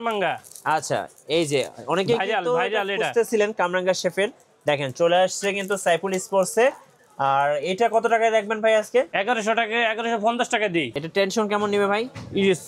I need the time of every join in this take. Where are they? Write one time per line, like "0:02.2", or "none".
0:09.1
0:11.0